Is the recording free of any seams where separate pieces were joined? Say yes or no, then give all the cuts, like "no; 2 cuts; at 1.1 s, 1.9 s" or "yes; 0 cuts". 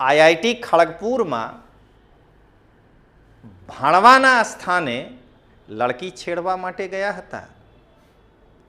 yes; 0 cuts